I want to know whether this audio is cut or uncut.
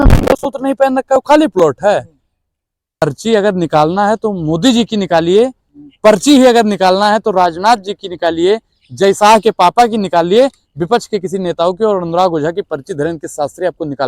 cut